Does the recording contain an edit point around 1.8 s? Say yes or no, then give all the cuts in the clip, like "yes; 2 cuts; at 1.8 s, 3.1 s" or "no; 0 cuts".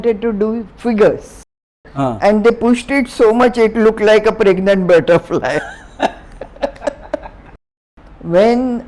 yes; 2 cuts; at 1.8 s, 7.7 s